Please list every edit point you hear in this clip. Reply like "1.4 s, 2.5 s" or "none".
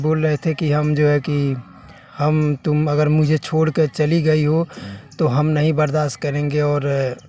none